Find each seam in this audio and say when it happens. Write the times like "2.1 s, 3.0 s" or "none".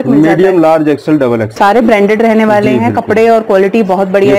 1.5 s